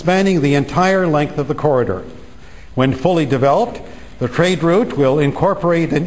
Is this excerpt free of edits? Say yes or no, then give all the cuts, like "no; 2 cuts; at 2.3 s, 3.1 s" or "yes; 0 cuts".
no; 1 cut; at 2.4 s